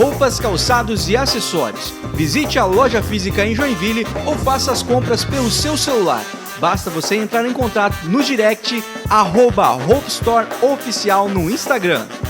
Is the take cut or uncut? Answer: uncut